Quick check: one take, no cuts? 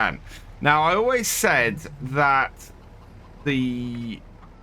yes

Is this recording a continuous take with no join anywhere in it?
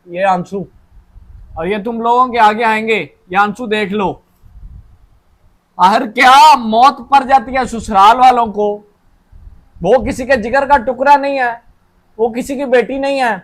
yes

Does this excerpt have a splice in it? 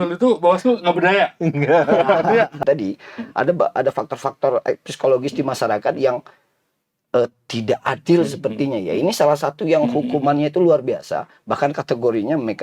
yes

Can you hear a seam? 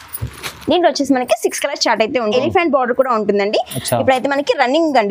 yes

